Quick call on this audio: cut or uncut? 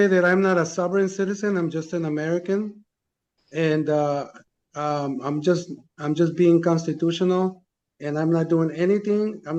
uncut